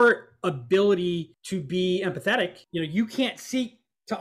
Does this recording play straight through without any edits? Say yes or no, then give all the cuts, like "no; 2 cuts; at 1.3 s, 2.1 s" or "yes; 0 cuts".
no; 2 cuts; at 1.4 s, 2.6 s